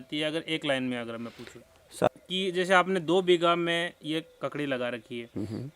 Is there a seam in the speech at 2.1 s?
yes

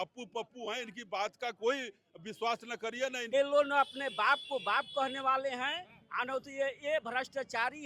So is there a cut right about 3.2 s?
yes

